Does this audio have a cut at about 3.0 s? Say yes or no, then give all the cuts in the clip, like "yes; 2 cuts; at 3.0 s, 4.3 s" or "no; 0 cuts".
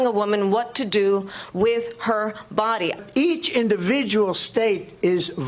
yes; 1 cut; at 3.0 s